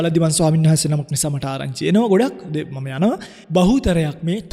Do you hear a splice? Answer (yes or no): yes